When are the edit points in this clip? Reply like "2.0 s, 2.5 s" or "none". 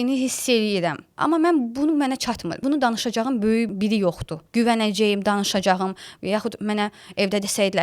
1.1 s, 2.6 s, 4.0 s